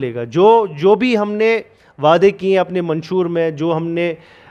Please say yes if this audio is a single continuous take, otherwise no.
yes